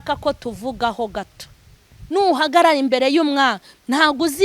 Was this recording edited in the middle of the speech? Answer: yes; 1 cut; at 2.0 s

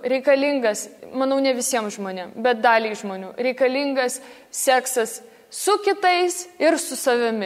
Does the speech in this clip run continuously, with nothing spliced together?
no; 1 cut; at 0.9 s

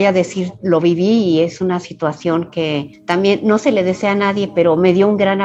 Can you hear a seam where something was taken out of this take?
no; 0 cuts

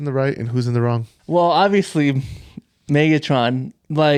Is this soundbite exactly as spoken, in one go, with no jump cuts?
yes; 0 cuts

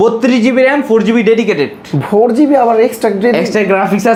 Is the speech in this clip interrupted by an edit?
no; 0 cuts

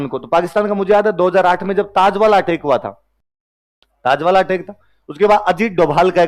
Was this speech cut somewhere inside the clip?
no; 0 cuts

